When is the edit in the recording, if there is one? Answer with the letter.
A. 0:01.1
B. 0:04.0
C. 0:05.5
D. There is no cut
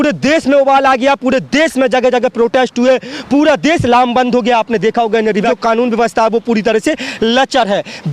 C